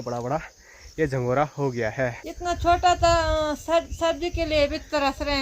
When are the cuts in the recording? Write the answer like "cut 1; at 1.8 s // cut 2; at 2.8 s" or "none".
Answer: cut 1; at 2.2 s